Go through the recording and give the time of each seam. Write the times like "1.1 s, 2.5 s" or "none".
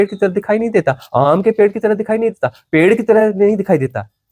none